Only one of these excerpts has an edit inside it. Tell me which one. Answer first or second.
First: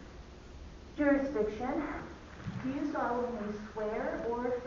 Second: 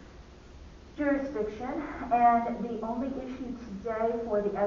first